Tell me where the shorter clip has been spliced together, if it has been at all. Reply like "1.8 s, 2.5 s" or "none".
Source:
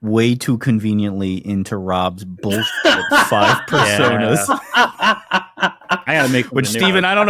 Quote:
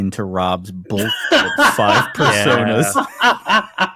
none